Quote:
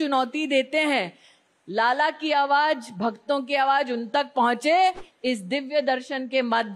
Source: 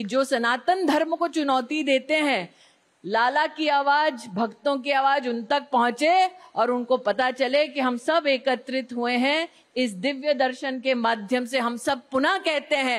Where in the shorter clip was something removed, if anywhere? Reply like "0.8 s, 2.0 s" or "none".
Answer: 5.1 s